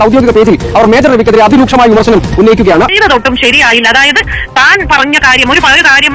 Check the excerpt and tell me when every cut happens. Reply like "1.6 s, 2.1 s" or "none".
2.9 s